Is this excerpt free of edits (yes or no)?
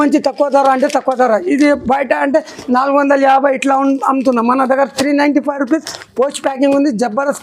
yes